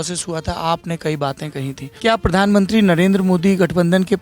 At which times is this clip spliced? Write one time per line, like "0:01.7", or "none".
0:01.9